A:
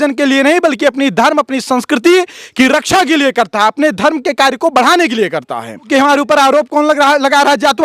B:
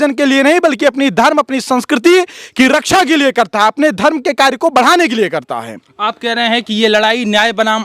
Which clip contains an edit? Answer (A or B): A